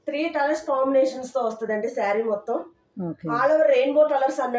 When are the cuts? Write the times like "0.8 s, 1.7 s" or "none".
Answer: none